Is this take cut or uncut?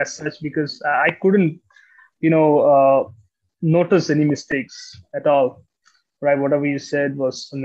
uncut